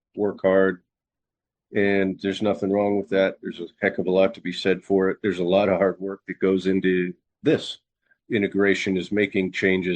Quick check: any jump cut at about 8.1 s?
yes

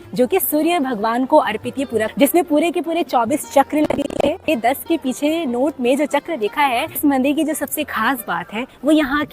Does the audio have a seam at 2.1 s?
yes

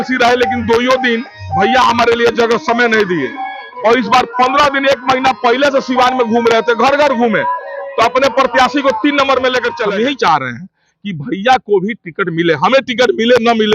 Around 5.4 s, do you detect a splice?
no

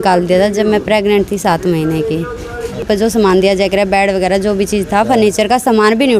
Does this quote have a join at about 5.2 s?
no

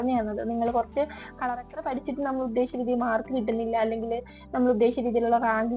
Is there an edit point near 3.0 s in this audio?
no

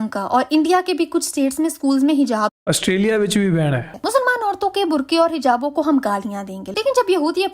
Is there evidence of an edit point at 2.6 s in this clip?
no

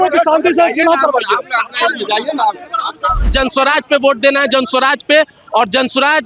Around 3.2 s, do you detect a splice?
yes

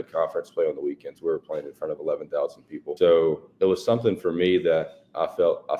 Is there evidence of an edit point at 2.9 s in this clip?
yes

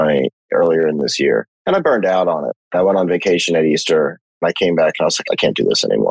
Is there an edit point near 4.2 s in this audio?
no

